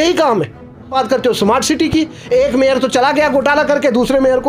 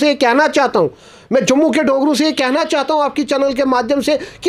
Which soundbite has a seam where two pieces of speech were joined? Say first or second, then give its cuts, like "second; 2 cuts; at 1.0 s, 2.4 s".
first; 1 cut; at 0.9 s